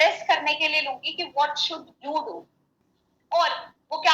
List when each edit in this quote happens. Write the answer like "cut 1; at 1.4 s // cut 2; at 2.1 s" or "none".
cut 1; at 2.9 s